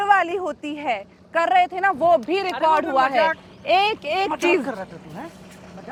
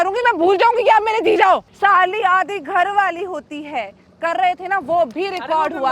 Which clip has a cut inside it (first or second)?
second